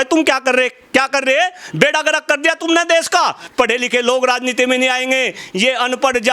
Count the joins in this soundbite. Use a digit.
1